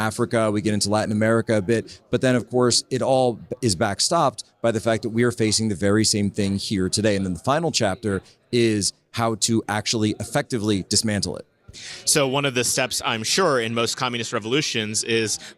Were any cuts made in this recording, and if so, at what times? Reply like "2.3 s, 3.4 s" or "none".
none